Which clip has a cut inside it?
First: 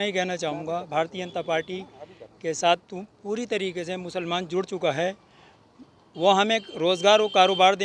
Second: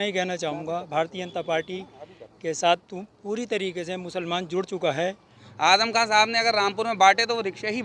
second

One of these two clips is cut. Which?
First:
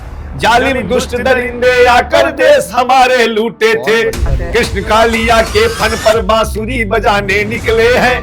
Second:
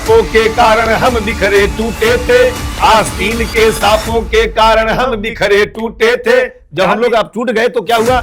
first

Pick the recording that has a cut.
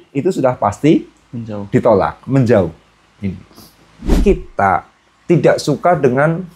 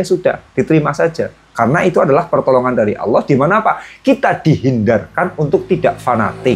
first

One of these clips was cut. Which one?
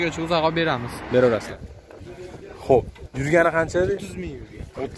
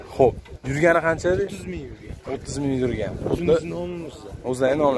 first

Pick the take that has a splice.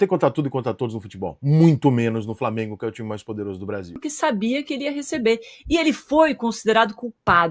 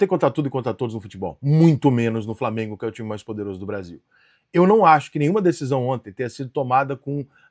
first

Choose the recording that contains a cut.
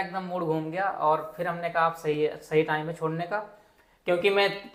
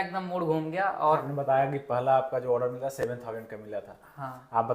second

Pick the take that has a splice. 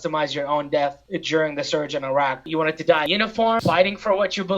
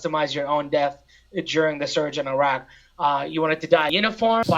first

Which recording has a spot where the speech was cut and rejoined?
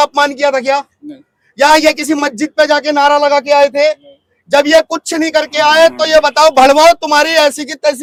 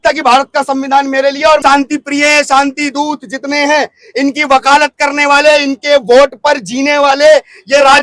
second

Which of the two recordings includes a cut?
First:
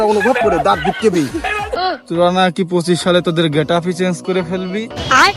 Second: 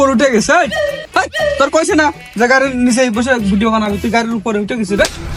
first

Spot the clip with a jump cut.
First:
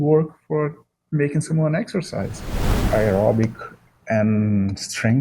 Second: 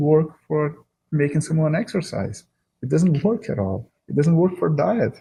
first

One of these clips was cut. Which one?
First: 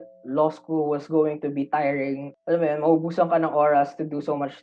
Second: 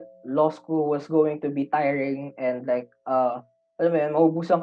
first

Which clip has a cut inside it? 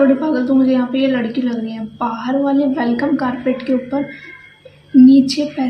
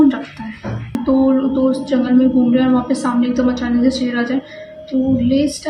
second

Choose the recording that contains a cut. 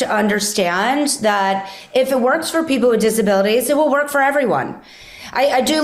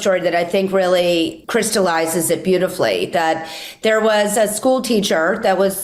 second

